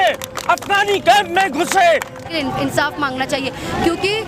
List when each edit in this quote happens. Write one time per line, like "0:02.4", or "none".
0:02.2